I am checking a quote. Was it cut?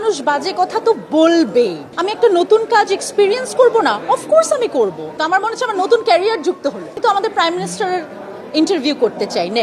yes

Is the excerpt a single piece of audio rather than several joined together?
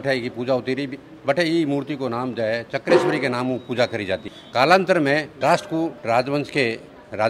yes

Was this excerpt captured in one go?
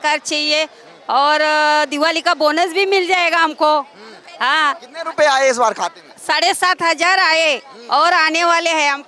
yes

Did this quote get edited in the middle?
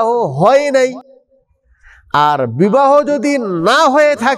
no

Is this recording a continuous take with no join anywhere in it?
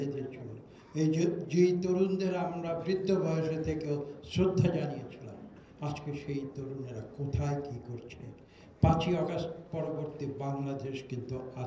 yes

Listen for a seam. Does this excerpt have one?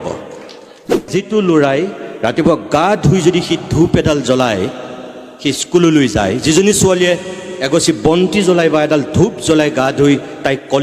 yes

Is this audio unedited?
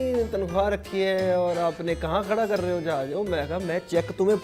yes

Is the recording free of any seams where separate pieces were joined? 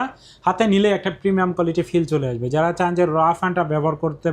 yes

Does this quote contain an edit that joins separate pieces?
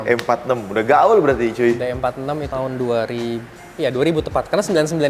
no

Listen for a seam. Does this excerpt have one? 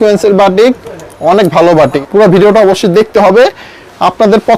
yes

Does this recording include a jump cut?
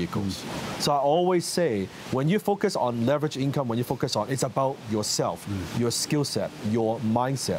no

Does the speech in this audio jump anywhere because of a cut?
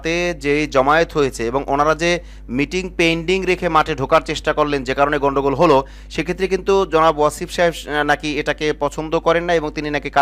no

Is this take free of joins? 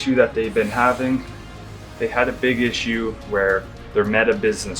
yes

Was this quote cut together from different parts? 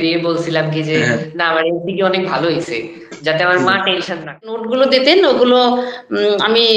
yes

